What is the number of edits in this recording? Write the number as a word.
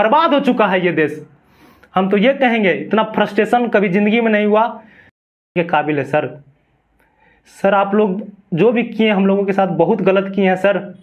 one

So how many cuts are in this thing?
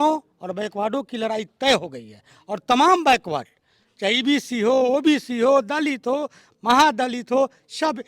zero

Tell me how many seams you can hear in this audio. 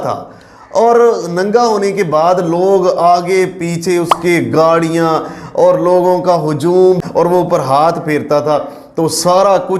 one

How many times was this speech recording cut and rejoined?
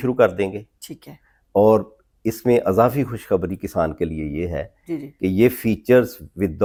zero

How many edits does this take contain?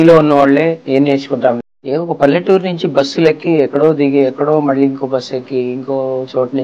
two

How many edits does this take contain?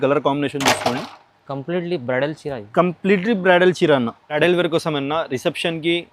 one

